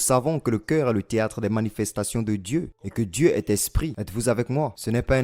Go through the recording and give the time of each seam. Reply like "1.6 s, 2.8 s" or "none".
2.8 s, 4.0 s